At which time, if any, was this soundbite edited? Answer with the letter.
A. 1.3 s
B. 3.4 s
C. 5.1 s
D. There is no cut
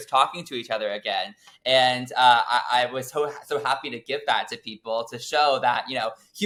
D